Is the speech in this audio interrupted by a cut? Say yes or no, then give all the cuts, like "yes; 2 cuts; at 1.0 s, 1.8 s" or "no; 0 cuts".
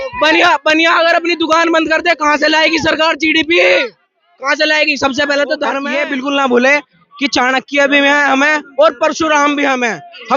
yes; 1 cut; at 5.9 s